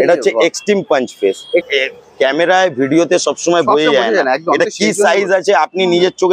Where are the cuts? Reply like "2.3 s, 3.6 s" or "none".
1.7 s